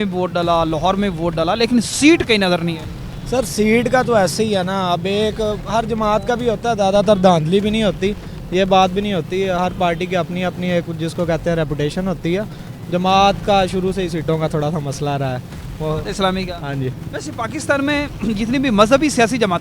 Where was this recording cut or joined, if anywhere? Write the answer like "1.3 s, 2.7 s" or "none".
none